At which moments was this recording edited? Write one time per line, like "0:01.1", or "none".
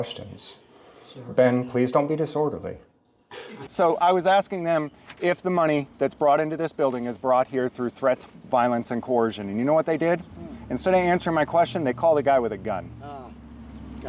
0:03.7